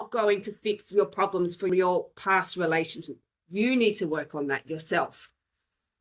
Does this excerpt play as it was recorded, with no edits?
no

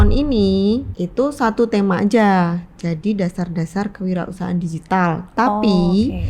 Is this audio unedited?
no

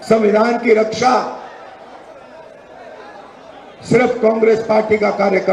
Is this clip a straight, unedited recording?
yes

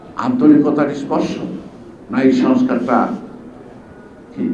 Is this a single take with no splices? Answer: yes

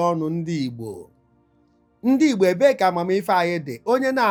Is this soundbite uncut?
yes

